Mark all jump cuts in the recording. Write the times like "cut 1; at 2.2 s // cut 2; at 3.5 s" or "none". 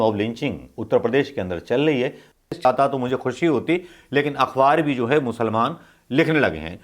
cut 1; at 2.5 s